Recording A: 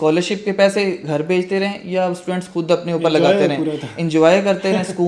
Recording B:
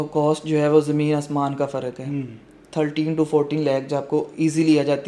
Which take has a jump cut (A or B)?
B